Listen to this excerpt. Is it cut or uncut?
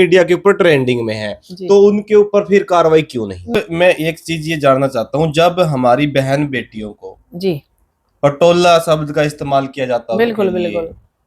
cut